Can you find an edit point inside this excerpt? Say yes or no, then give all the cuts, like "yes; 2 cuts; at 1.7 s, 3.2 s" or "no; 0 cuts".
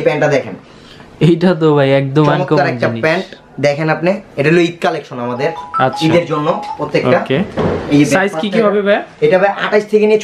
no; 0 cuts